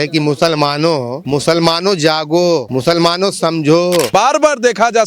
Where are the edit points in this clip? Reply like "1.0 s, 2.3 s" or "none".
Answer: 1.2 s, 2.7 s, 4.1 s